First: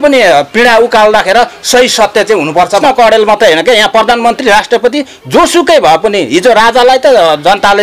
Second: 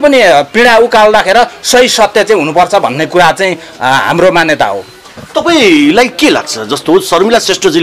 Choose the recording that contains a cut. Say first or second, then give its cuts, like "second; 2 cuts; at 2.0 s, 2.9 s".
first; 1 cut; at 2.8 s